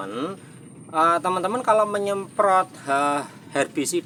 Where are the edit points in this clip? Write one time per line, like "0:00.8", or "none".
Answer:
none